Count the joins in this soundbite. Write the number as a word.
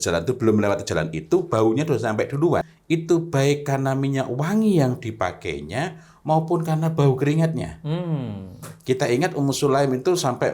one